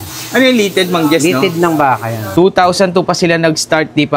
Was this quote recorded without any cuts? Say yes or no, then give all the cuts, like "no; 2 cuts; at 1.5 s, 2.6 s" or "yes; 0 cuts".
no; 1 cut; at 2.2 s